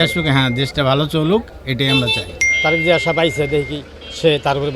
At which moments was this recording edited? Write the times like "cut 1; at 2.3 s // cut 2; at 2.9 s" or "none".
cut 1; at 2.5 s